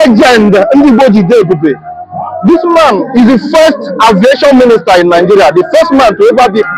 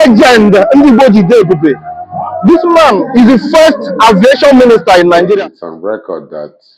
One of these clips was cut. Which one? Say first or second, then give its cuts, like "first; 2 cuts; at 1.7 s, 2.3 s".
second; 1 cut; at 5.4 s